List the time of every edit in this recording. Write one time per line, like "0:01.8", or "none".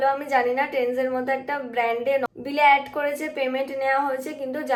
none